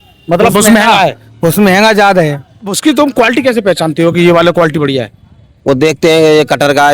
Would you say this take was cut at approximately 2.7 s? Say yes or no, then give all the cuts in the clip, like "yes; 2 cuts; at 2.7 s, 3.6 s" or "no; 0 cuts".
yes; 1 cut; at 2.7 s